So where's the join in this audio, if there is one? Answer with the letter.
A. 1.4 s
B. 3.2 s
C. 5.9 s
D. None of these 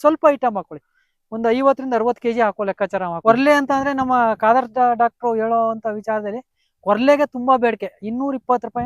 B